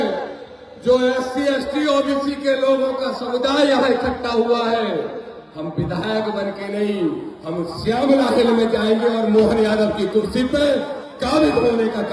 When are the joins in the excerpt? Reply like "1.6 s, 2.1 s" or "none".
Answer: none